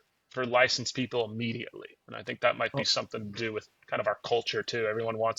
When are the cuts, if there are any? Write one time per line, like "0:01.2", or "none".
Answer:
none